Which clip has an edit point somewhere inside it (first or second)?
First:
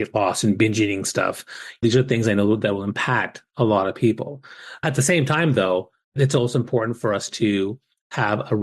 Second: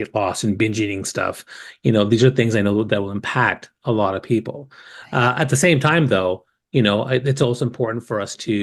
first